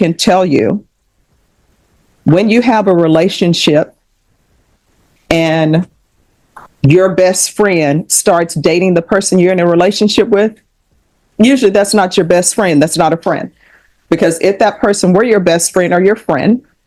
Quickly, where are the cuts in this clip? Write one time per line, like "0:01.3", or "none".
none